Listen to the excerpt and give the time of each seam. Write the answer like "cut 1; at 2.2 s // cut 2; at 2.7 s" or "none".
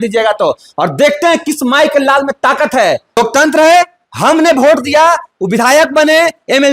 cut 1; at 3.2 s